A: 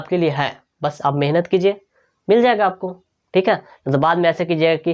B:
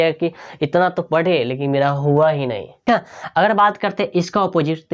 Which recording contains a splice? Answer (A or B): B